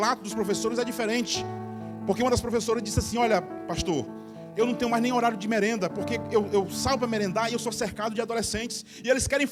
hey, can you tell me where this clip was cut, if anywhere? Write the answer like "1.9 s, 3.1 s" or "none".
none